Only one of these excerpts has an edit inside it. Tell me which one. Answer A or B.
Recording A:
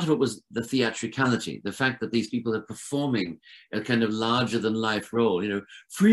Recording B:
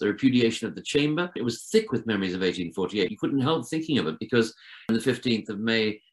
B